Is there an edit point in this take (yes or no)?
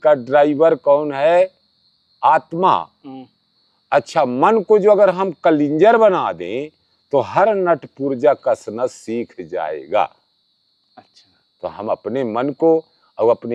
no